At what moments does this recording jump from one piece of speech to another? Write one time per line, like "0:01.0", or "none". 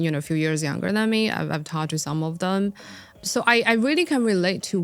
0:03.2